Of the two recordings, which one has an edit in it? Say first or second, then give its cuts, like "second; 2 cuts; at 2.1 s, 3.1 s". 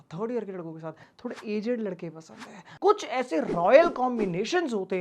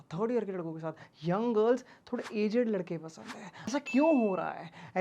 first; 2 cuts; at 1.1 s, 2.8 s